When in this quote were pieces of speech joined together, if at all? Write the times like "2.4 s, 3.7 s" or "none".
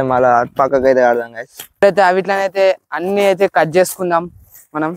1.8 s